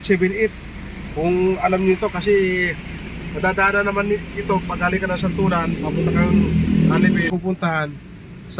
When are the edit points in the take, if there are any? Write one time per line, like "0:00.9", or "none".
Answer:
0:07.3